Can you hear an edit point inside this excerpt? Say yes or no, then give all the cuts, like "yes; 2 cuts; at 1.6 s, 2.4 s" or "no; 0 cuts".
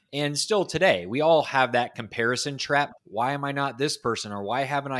yes; 1 cut; at 3.0 s